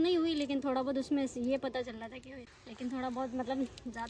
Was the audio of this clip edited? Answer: yes; 1 cut; at 2.4 s

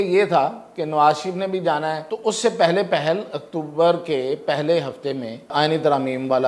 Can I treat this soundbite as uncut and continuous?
no; 2 cuts; at 2.0 s, 5.5 s

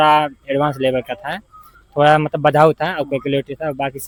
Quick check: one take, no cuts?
yes; 0 cuts

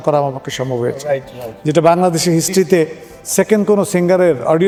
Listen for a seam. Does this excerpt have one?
no; 0 cuts

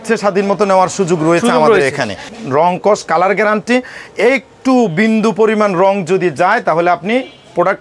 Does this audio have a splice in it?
yes; 1 cut; at 2.3 s

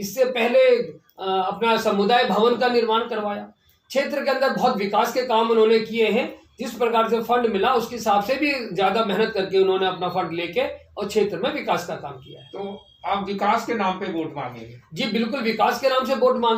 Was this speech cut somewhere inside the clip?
no; 0 cuts

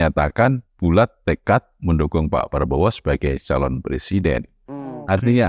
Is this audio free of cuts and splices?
yes; 0 cuts

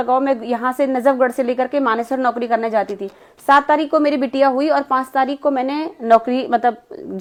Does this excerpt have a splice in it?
no; 0 cuts

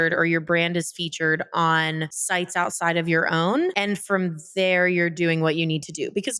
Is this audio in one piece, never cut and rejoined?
yes; 0 cuts

